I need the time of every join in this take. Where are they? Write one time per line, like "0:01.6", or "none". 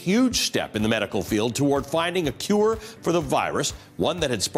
none

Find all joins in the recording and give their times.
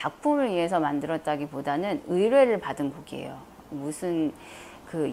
none

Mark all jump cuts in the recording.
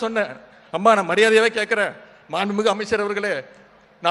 none

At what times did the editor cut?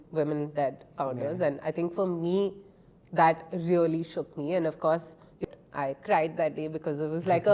0:05.4

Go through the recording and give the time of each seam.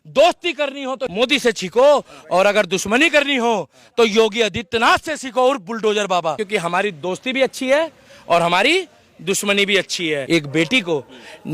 0:01.0
0:06.4
0:10.2

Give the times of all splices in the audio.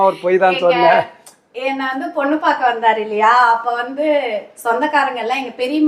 none

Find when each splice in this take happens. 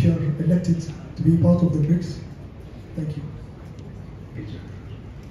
0:04.4

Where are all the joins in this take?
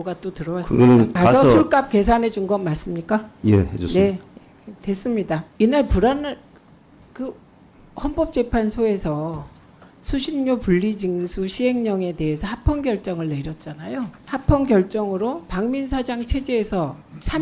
0:01.2
0:05.5
0:14.2

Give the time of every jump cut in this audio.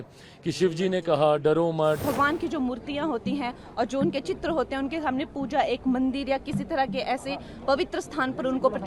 0:02.0

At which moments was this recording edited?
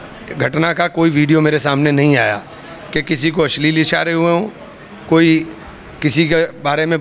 none

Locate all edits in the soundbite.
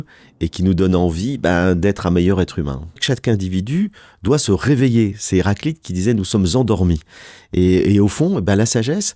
0:03.0

